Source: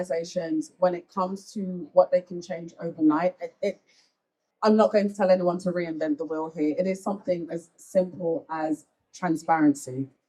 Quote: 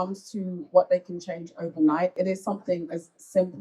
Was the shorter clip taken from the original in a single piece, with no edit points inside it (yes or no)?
no